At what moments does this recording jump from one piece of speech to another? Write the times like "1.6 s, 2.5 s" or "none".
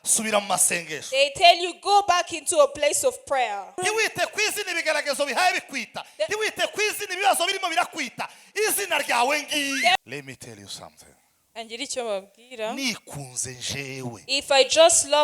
3.8 s, 10.0 s